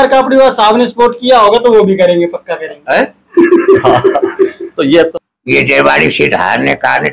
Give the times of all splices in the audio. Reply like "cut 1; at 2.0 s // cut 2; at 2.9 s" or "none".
cut 1; at 5.1 s